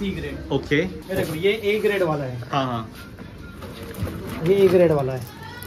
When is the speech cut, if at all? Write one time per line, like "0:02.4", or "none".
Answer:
0:01.0